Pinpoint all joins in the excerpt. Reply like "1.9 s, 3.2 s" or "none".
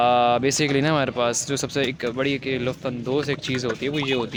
none